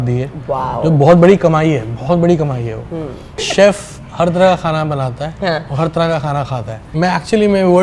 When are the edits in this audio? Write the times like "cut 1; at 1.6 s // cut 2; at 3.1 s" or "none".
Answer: cut 1; at 3.5 s // cut 2; at 6.9 s

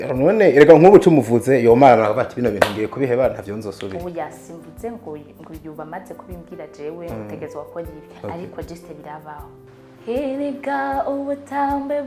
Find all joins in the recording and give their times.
cut 1; at 9.6 s

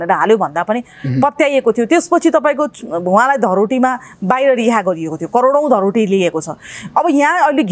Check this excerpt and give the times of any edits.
none

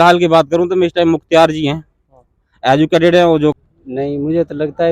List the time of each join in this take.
cut 1; at 3.6 s

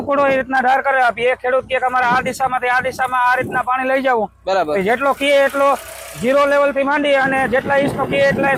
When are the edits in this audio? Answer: none

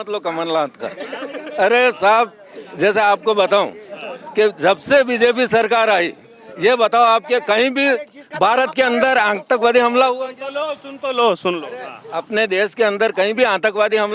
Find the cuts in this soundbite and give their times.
none

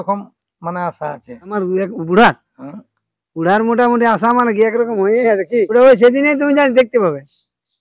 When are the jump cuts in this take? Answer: cut 1; at 1.5 s // cut 2; at 5.7 s

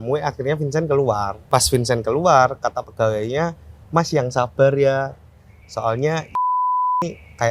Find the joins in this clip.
cut 1; at 1.4 s

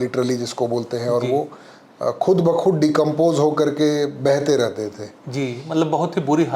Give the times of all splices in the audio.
none

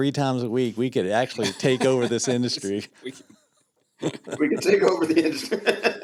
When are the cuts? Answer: none

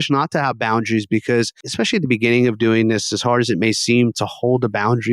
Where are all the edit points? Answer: cut 1; at 1.6 s

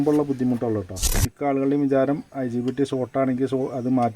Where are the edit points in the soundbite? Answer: cut 1; at 1.3 s

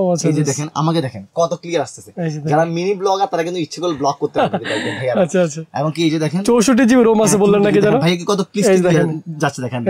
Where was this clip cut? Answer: none

